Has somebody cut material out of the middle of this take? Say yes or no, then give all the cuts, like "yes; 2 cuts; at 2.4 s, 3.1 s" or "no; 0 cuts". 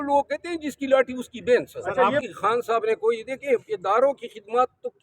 yes; 1 cut; at 2.3 s